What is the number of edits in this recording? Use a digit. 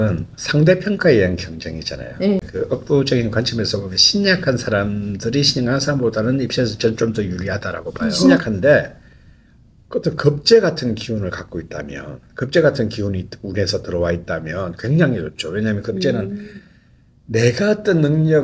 2